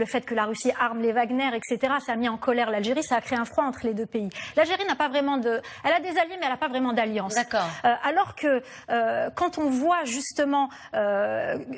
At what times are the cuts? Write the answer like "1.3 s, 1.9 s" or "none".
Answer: none